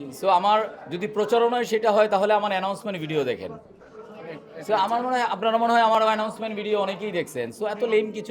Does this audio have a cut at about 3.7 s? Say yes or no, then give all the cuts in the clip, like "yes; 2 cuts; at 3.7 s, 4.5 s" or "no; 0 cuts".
no; 0 cuts